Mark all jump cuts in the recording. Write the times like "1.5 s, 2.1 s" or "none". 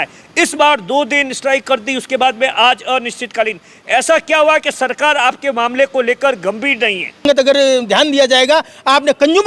7.2 s